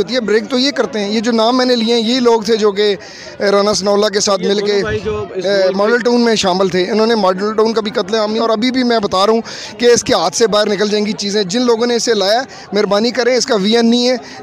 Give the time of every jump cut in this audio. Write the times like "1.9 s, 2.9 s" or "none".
8.4 s